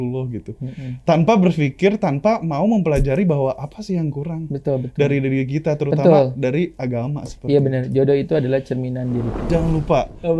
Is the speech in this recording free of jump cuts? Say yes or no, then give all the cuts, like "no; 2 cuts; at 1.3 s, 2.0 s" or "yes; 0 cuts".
no; 1 cut; at 9.5 s